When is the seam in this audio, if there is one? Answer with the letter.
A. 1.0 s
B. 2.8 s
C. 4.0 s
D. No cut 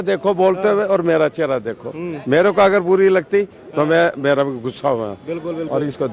D